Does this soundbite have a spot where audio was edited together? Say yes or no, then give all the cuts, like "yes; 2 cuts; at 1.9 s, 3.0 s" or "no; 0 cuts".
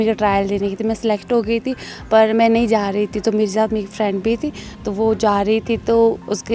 no; 0 cuts